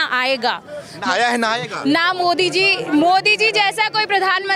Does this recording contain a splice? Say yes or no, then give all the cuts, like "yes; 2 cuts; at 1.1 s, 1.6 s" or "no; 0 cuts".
no; 0 cuts